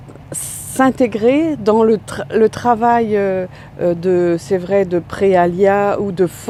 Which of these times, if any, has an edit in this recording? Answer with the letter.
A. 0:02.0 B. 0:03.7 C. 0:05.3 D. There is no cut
D